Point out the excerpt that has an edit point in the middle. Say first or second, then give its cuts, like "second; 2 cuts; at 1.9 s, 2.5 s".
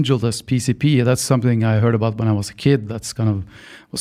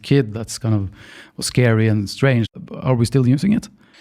second; 1 cut; at 2.5 s